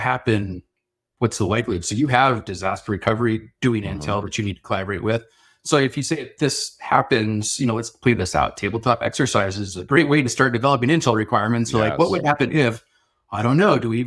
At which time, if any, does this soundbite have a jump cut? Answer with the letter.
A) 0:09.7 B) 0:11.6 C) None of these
C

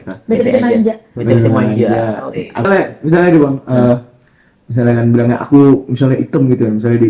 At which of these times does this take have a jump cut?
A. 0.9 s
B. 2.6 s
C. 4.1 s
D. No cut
B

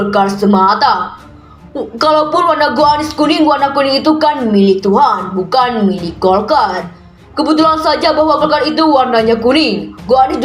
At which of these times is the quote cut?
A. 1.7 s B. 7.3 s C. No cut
C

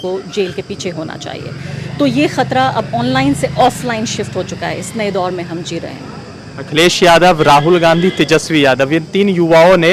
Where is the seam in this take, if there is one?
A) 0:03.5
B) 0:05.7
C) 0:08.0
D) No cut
D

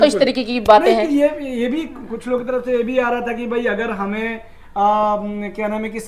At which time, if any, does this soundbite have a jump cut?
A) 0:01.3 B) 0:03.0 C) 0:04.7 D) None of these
D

